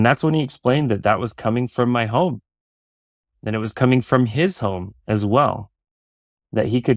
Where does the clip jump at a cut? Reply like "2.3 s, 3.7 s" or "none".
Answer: none